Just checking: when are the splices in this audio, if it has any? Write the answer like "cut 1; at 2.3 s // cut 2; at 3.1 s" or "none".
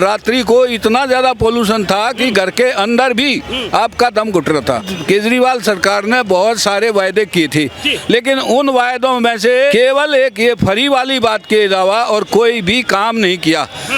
cut 1; at 4.9 s // cut 2; at 9.7 s